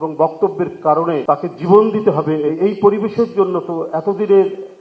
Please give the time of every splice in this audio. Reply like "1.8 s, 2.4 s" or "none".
1.2 s, 2.5 s